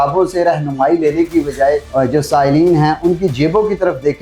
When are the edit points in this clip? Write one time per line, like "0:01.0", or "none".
0:01.9